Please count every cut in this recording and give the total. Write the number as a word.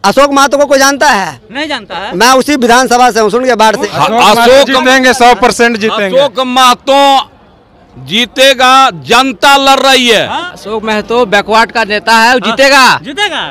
two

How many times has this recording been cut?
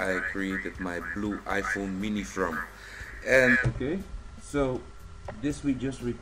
zero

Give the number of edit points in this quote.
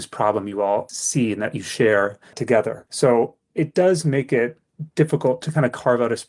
two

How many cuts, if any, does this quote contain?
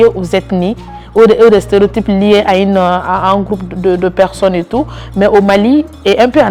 zero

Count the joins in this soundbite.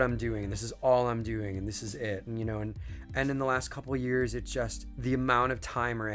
two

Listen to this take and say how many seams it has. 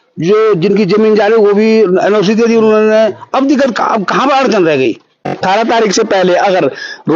one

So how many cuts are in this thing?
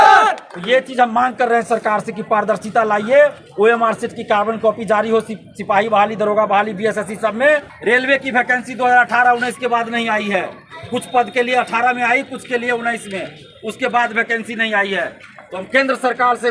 one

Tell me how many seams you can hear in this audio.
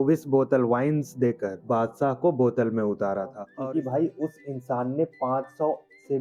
one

